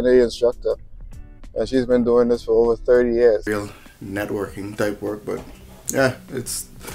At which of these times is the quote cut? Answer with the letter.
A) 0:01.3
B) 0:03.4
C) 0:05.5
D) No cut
B